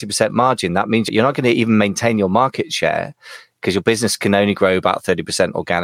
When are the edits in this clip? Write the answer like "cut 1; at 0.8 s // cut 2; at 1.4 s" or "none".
cut 1; at 1.1 s